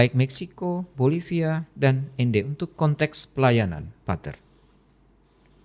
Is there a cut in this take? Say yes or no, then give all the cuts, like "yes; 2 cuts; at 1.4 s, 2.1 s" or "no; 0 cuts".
no; 0 cuts